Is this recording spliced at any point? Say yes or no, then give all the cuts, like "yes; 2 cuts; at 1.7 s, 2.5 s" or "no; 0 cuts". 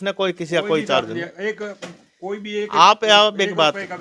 no; 0 cuts